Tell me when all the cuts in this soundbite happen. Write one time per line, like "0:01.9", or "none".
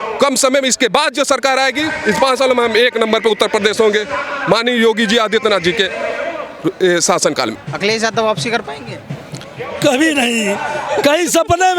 0:07.6